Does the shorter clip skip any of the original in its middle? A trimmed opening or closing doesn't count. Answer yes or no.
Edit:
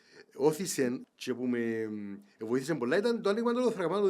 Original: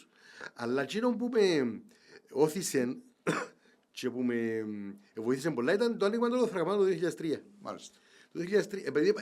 yes